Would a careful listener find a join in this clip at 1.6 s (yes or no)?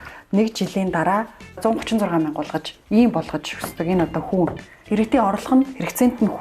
yes